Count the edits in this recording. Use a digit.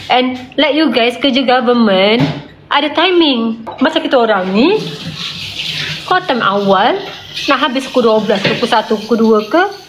1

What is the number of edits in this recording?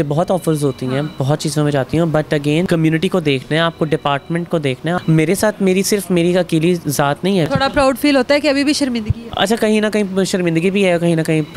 4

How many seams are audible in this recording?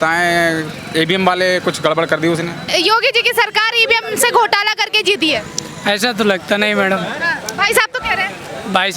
1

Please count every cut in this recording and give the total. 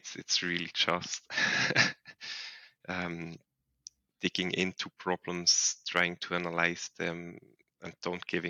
0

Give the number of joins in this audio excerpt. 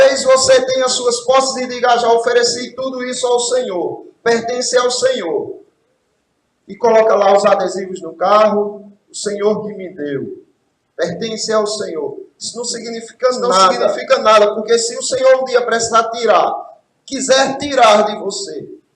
1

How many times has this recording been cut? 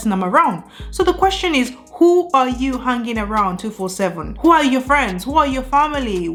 0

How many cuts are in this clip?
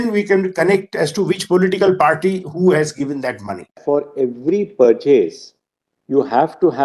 1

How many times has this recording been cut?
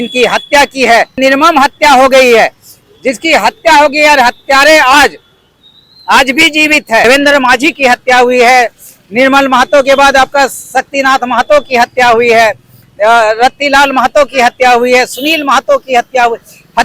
2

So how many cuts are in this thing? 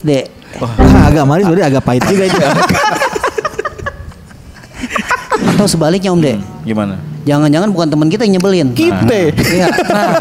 1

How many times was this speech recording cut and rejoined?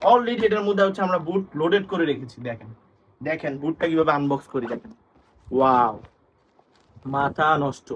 0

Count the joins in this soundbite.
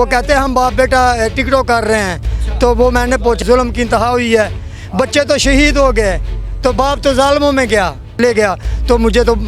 2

